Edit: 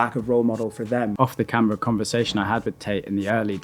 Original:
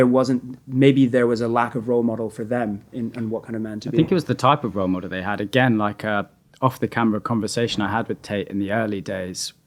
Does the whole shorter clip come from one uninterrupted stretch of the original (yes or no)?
no